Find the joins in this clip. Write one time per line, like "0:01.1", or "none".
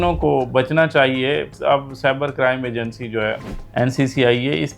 0:01.5